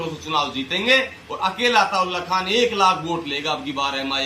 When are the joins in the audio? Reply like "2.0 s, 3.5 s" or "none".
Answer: none